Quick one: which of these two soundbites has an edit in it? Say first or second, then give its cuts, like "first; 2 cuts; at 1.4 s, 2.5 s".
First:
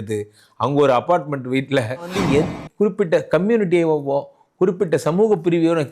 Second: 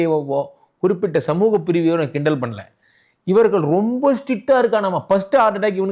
first; 1 cut; at 2.1 s